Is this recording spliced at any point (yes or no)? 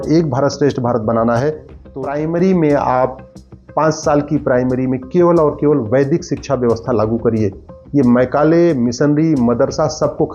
yes